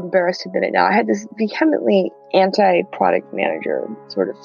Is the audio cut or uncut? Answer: cut